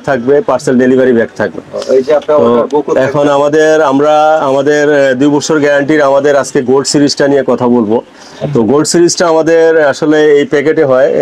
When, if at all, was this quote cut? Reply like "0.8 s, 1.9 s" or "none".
none